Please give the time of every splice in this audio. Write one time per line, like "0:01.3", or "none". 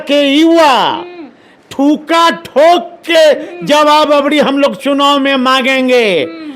0:04.8